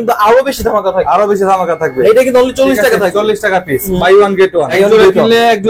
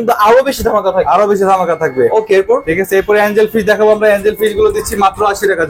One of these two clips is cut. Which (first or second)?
first